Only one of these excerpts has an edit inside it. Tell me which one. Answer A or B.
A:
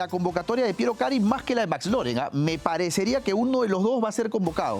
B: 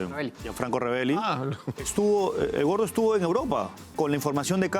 B